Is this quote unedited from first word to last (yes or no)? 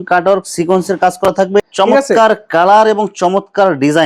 no